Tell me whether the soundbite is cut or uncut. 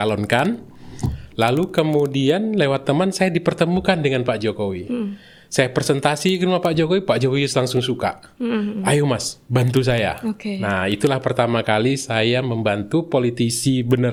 uncut